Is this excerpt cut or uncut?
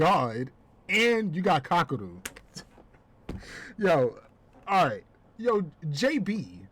cut